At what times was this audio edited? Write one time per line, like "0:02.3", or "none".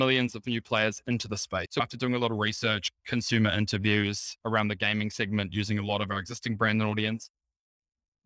0:01.8